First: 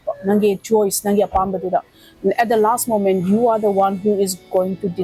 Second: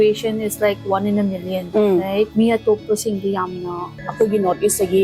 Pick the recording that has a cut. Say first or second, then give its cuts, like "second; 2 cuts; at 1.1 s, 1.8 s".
second; 3 cuts; at 1.6 s, 2.3 s, 4.0 s